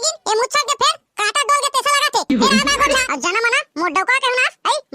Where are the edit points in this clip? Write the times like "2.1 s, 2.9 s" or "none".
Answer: 3.0 s